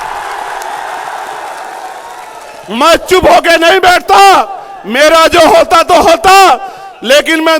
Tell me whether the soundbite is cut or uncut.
uncut